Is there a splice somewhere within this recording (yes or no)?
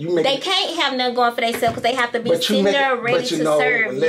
no